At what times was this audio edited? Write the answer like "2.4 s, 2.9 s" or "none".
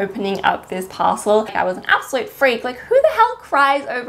1.5 s